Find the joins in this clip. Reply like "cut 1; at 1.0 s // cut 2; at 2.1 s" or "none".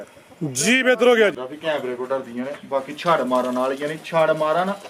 cut 1; at 1.4 s